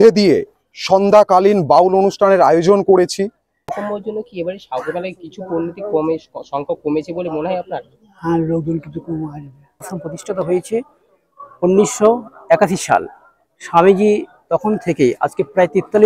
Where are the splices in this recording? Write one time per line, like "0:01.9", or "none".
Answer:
0:03.7
0:10.0